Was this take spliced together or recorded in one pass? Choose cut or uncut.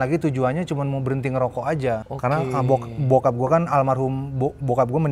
cut